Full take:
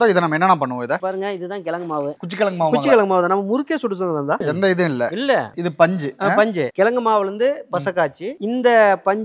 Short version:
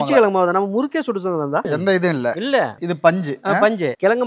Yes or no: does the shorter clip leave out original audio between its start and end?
no